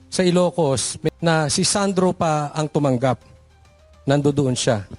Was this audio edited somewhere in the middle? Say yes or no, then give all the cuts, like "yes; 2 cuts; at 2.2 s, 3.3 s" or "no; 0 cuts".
yes; 1 cut; at 0.9 s